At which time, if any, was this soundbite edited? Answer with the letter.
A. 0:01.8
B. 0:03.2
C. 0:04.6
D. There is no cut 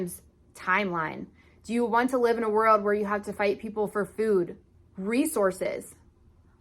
C